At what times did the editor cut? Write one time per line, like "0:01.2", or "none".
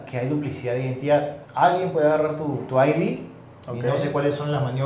none